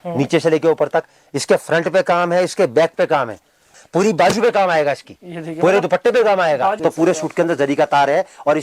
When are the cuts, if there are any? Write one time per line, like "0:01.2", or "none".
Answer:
0:03.8
0:06.8